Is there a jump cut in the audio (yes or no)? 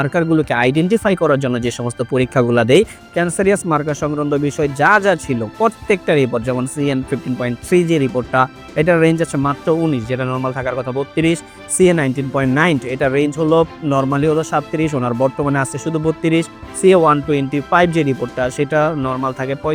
no